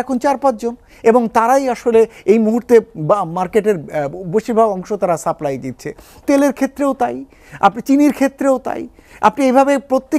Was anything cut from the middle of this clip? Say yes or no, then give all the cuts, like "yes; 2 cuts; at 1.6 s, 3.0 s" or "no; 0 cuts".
no; 0 cuts